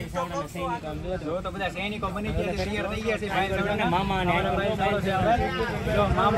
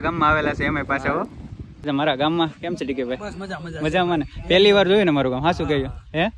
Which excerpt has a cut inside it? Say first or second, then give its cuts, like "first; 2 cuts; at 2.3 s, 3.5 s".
second; 1 cut; at 1.9 s